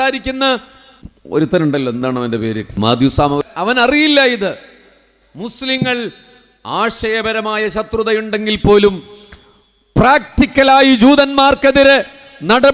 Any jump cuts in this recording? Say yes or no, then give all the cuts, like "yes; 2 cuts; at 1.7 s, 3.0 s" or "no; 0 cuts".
yes; 2 cuts; at 2.8 s, 3.4 s